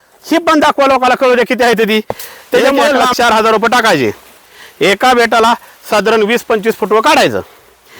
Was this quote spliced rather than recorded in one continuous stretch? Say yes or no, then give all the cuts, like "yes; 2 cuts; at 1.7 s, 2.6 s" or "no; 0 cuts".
yes; 1 cut; at 2.6 s